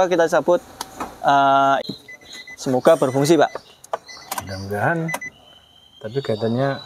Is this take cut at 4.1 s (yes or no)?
no